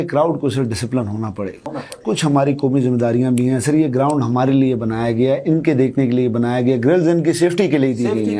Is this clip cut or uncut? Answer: cut